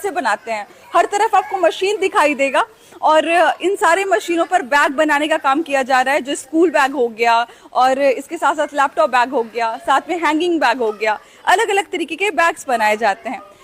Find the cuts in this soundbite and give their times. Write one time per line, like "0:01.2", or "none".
none

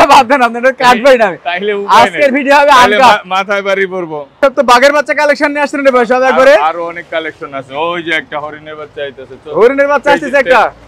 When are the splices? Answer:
0:04.4

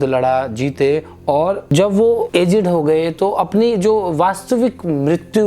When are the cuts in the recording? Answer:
0:01.7
0:02.3

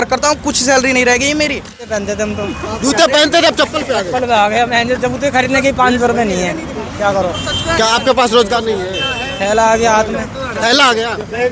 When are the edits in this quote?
0:01.9

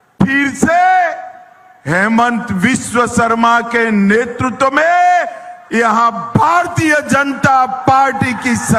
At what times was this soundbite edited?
none

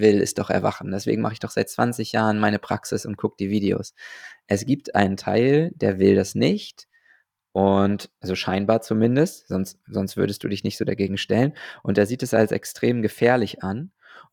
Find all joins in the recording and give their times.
none

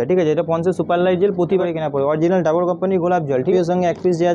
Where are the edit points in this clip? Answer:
0:01.6
0:03.5

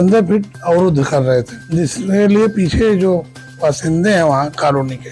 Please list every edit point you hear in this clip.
0:01.7

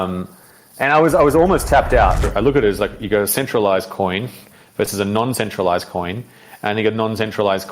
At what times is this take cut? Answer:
0:02.3

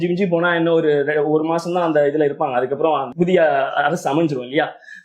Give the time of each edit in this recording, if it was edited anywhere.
0:03.1

